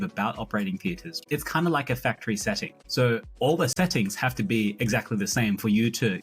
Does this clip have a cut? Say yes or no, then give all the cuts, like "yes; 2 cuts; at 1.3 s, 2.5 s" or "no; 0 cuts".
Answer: yes; 2 cuts; at 1.1 s, 2.7 s